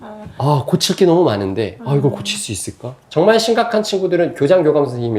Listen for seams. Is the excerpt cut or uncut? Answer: cut